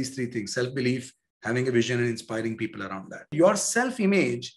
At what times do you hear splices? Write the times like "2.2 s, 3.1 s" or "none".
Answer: 3.3 s